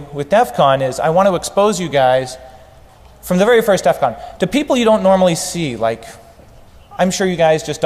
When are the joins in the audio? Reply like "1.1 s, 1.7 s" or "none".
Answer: none